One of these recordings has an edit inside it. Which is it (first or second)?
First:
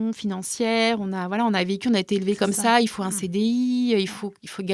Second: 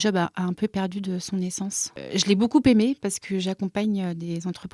second